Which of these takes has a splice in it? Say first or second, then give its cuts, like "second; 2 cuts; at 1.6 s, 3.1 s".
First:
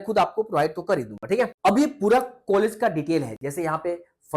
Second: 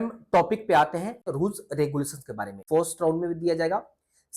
second; 2 cuts; at 1.2 s, 2.5 s